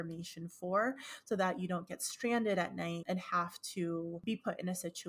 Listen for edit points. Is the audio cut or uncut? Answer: uncut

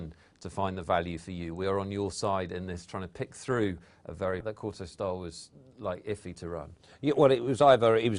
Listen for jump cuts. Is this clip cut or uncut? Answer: uncut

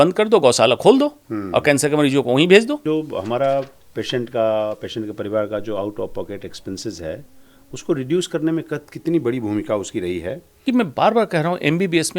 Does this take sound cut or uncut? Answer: cut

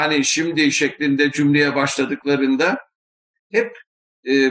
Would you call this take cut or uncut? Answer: uncut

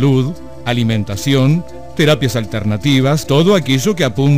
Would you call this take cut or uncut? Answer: cut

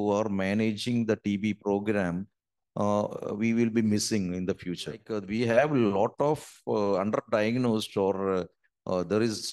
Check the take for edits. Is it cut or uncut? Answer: cut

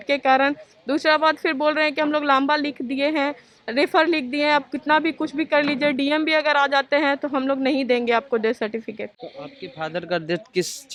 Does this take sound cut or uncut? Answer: uncut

